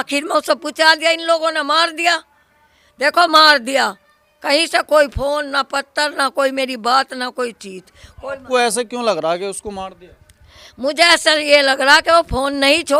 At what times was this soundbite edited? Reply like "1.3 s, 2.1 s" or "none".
none